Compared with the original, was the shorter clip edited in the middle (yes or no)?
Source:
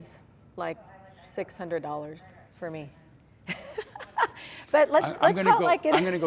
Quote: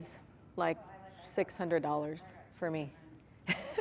no